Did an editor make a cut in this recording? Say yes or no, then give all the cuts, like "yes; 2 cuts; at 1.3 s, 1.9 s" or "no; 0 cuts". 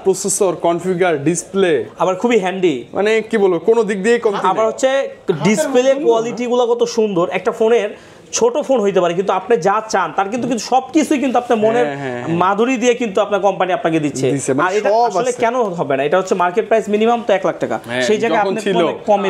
no; 0 cuts